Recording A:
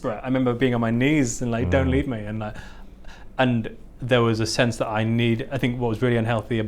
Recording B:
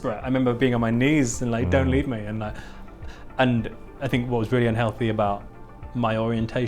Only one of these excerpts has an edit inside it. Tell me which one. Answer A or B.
B